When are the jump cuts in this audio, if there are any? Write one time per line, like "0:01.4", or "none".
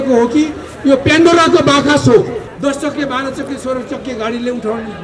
0:02.5